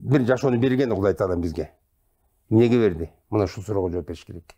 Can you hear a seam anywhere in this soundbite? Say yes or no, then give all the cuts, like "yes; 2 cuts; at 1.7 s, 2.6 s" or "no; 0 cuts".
no; 0 cuts